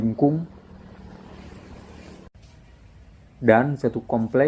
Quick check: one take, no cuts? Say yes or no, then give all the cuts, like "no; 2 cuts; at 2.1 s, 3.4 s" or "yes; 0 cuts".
no; 1 cut; at 2.3 s